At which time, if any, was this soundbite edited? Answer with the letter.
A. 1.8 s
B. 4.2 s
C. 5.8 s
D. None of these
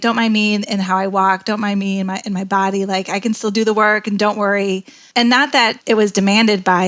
C